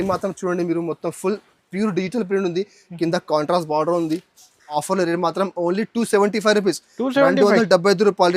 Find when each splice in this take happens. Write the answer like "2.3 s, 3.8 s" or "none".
4.8 s